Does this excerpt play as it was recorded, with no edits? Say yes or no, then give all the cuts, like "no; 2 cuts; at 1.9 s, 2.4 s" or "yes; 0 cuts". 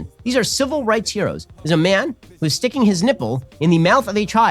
no; 1 cut; at 1.5 s